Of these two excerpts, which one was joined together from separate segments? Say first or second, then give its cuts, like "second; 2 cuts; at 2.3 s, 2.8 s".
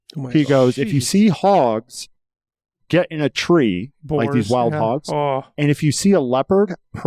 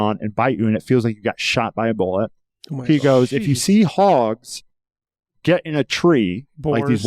first; 1 cut; at 5.5 s